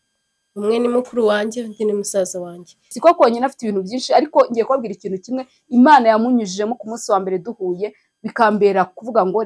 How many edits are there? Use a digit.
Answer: 1